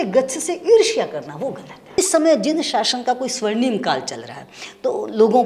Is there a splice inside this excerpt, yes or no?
yes